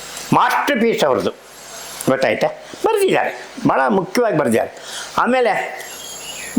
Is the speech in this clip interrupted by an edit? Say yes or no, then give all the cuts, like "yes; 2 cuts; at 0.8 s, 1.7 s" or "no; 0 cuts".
no; 0 cuts